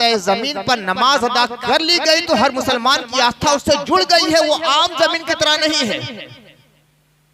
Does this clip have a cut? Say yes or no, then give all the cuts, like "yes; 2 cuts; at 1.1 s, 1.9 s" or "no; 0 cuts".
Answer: no; 0 cuts